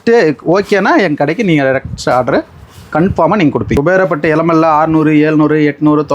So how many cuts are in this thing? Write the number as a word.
one